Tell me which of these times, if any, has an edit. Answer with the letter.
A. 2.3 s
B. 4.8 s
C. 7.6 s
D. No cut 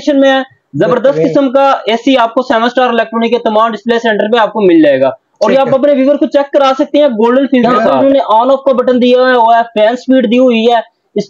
C